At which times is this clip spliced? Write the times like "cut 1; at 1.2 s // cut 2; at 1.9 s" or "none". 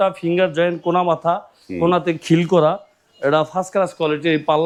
none